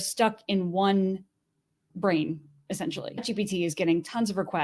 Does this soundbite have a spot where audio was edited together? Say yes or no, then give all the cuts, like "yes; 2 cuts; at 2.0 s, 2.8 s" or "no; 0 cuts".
yes; 1 cut; at 3.2 s